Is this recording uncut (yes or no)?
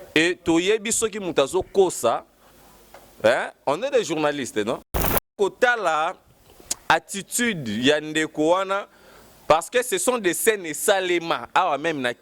no